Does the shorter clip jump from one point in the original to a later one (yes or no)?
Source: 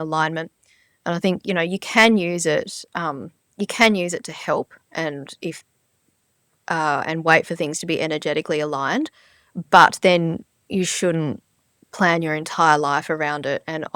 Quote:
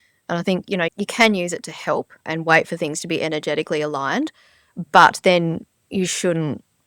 yes